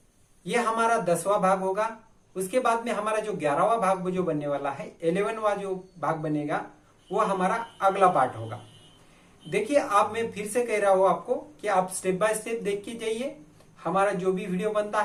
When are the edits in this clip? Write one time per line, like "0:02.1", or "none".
none